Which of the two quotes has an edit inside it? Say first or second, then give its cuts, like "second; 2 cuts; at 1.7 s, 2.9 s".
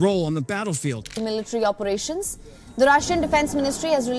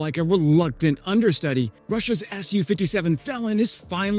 first; 1 cut; at 1.1 s